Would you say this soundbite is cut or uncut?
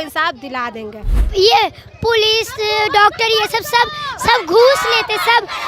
cut